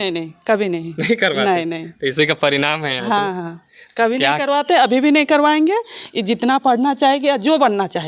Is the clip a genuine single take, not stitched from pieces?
yes; 0 cuts

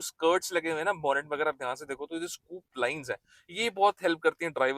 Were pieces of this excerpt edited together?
no; 0 cuts

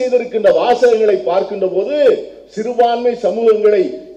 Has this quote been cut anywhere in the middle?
no; 0 cuts

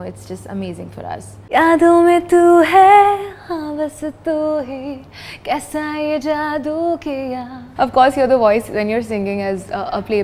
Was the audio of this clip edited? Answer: yes; 2 cuts; at 1.3 s, 7.7 s

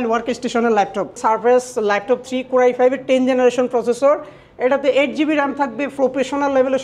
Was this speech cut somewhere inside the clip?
yes; 2 cuts; at 1.2 s, 5.9 s

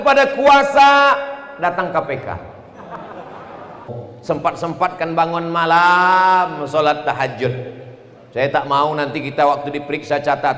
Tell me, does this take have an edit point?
yes; 1 cut; at 4.0 s

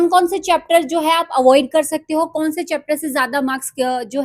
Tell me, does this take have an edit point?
no; 0 cuts

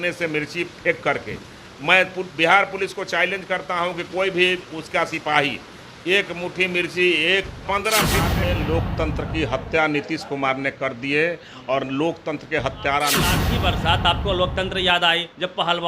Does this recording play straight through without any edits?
no; 2 cuts; at 8.3 s, 13.4 s

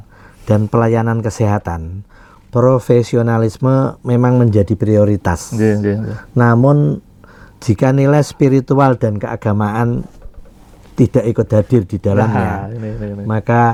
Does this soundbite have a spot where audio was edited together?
no; 0 cuts

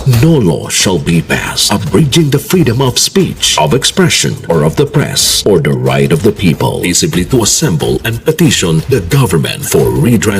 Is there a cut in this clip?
no; 0 cuts

